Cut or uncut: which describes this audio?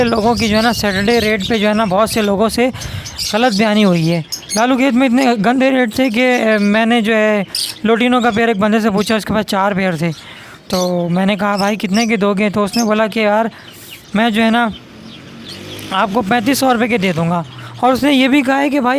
cut